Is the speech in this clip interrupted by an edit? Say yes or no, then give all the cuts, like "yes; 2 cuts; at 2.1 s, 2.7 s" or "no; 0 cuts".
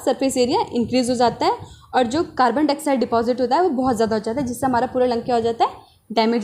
no; 0 cuts